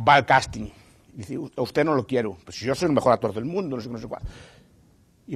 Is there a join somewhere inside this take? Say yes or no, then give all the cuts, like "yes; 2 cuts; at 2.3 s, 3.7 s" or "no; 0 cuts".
no; 0 cuts